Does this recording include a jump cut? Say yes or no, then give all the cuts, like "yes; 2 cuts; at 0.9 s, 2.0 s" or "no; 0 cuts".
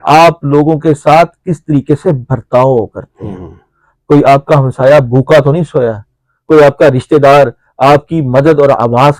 no; 0 cuts